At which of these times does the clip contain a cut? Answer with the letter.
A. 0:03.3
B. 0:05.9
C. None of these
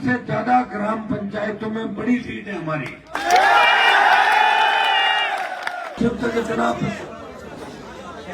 B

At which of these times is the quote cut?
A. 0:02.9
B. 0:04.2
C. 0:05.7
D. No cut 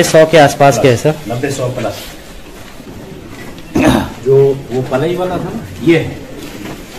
A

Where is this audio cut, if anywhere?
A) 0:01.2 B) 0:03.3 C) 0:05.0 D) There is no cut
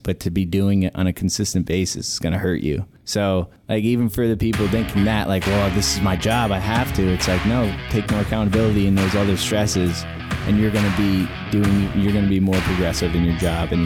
B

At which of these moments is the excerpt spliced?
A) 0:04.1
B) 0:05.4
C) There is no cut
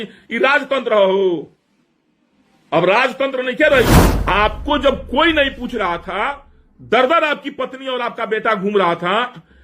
A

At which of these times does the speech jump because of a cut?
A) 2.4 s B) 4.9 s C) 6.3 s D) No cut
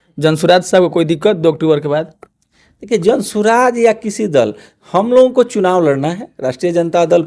D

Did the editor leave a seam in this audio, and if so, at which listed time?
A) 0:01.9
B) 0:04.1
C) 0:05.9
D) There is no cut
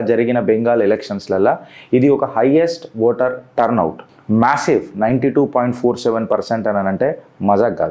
D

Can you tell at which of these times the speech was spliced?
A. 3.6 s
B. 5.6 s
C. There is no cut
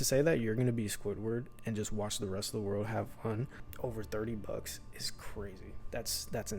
A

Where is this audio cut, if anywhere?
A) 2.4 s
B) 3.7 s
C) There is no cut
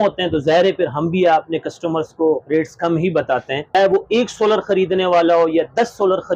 B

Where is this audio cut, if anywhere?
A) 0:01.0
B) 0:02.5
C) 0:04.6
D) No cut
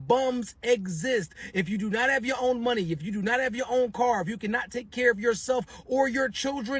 A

